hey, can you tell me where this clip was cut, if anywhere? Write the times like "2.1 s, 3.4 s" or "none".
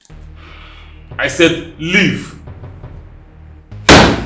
1.2 s